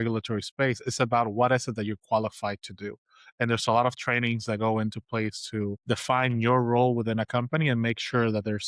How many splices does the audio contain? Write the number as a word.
one